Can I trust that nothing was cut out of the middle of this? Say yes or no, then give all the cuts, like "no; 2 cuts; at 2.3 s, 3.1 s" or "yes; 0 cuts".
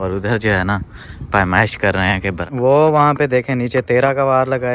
no; 1 cut; at 2.4 s